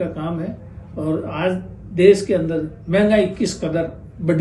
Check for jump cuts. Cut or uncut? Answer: uncut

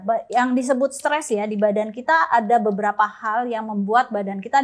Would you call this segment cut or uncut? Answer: uncut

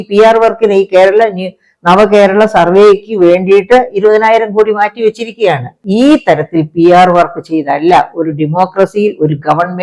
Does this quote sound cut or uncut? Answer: cut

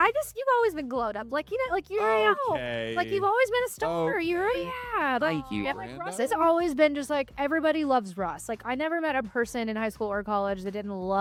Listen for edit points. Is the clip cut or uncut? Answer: uncut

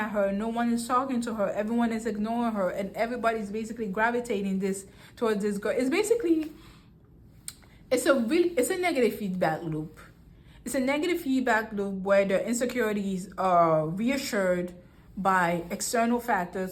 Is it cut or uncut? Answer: uncut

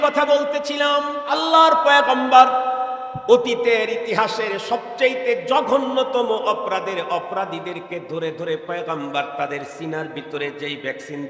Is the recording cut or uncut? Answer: cut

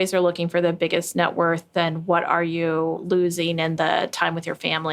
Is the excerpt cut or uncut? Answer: uncut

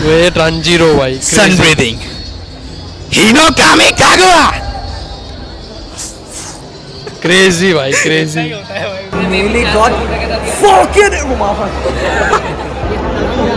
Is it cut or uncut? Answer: cut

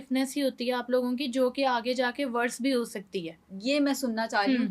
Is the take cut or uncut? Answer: uncut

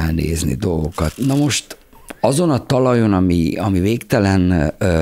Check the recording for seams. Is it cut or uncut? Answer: cut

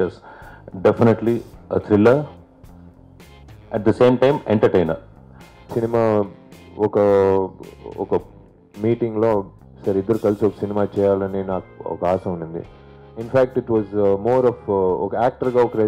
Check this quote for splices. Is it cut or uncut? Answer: cut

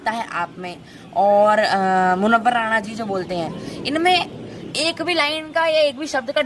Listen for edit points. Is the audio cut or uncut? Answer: uncut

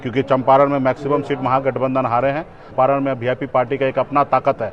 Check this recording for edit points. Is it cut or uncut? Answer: cut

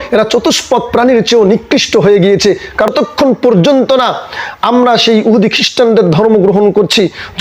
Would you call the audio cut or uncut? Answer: cut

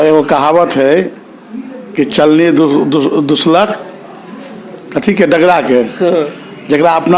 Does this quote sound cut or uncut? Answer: uncut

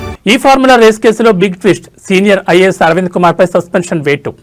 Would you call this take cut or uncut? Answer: uncut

